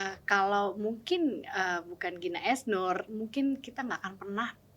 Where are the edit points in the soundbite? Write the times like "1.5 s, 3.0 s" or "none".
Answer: 3.1 s